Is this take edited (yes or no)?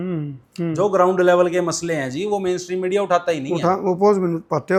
no